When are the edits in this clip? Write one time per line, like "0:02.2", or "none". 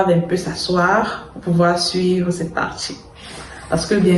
none